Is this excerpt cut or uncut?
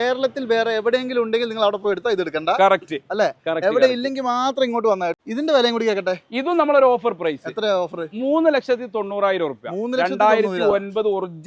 cut